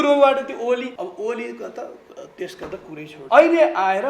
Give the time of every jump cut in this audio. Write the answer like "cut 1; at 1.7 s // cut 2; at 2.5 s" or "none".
cut 1; at 0.9 s // cut 2; at 3.1 s